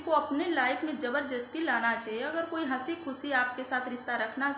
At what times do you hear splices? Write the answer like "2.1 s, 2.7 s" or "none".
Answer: none